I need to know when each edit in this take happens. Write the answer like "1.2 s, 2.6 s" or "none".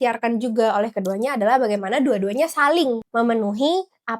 3.0 s